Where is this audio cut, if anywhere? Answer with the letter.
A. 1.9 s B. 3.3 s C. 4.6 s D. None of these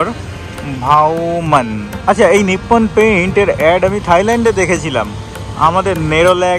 A